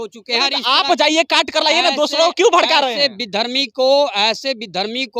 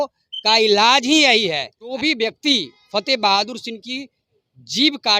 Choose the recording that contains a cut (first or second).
second